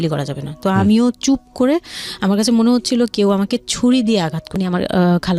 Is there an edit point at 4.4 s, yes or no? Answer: yes